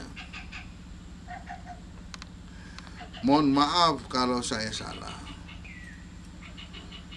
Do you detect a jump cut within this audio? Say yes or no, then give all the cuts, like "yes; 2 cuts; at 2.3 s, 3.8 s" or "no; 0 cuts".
yes; 1 cut; at 5.7 s